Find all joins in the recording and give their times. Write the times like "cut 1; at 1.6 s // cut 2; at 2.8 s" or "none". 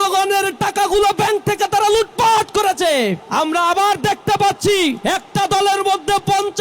cut 1; at 3.2 s // cut 2; at 5.0 s